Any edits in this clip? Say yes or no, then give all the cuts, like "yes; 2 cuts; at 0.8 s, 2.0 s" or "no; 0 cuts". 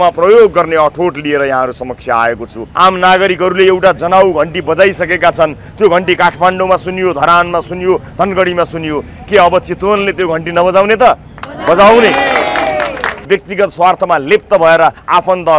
yes; 2 cuts; at 2.6 s, 13.3 s